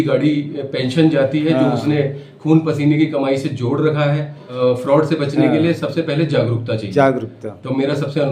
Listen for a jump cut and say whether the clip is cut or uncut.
cut